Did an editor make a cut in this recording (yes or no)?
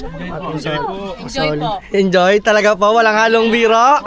no